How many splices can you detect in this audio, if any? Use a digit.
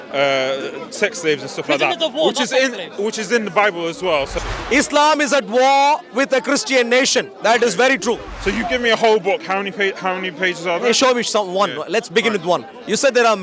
2